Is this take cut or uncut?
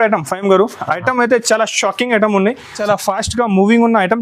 cut